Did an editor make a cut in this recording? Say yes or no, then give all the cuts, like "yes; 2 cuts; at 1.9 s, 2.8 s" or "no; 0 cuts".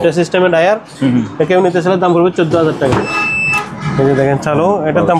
yes; 1 cut; at 3.2 s